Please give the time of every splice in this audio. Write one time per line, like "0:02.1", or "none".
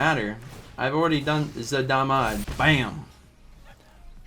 0:02.5